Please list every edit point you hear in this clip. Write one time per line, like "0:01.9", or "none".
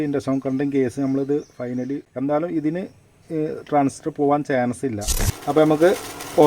0:02.0
0:05.1